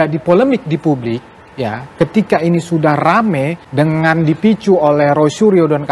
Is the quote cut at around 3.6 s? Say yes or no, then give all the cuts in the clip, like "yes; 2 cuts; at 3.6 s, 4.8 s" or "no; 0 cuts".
yes; 1 cut; at 3.6 s